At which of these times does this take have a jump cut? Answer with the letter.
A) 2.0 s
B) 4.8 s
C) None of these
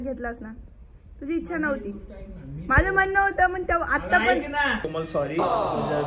B